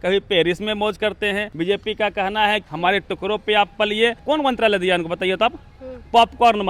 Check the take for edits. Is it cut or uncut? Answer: cut